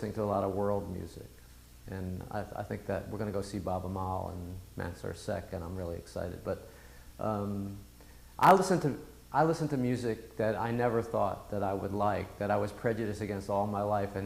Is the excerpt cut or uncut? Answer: cut